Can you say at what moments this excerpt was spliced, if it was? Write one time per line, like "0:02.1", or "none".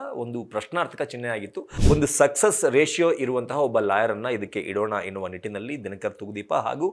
0:01.7